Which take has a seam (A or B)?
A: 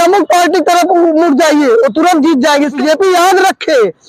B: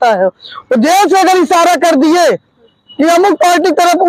A